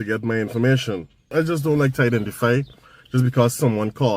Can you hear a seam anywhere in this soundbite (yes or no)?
yes